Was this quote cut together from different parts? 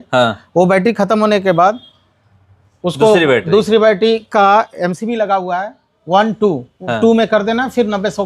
no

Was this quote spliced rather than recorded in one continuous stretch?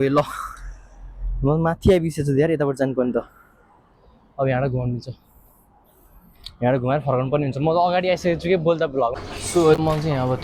yes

